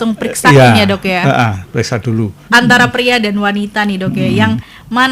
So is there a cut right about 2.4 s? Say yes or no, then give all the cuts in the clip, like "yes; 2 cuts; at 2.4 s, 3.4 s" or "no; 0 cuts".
yes; 1 cut; at 2.4 s